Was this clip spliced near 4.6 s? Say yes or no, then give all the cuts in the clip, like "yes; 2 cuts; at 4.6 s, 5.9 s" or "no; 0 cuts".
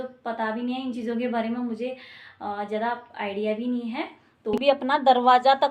yes; 1 cut; at 4.6 s